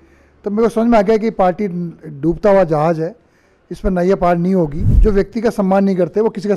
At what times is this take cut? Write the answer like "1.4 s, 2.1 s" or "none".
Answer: 4.8 s

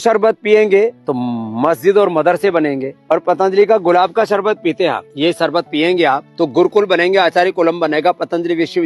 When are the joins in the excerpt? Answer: 1.1 s, 2.9 s, 5.1 s, 6.3 s

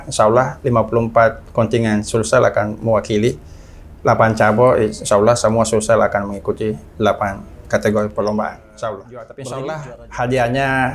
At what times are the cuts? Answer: 9.3 s

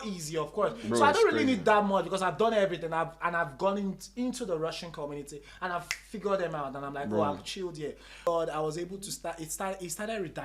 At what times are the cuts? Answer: 8.3 s

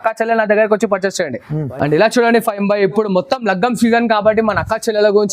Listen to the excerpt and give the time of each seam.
1.6 s

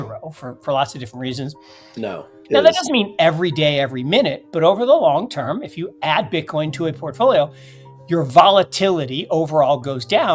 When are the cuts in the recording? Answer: 2.3 s

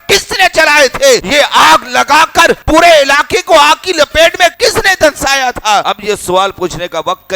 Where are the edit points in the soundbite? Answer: none

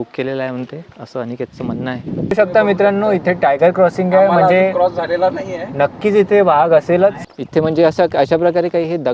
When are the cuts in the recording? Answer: 2.3 s, 7.3 s

